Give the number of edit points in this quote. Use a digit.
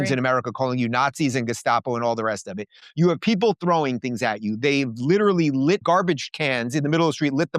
1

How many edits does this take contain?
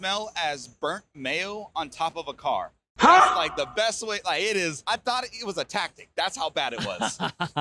0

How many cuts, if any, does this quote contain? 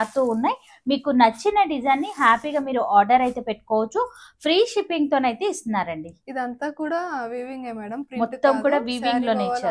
0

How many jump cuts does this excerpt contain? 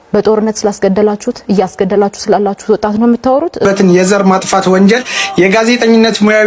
1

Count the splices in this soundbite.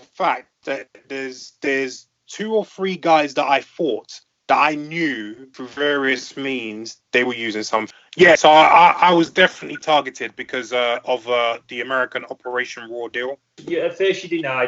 2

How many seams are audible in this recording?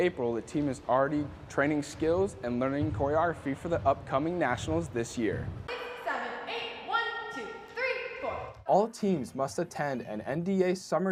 0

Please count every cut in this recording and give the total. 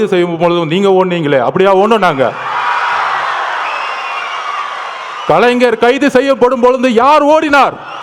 0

